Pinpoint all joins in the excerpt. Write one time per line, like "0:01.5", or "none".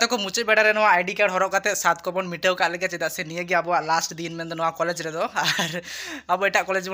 none